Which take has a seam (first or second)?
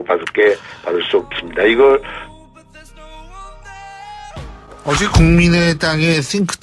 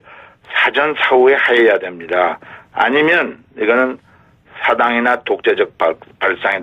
first